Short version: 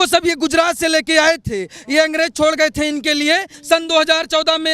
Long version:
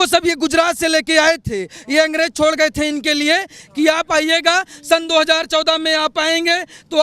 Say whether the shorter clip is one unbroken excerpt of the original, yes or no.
no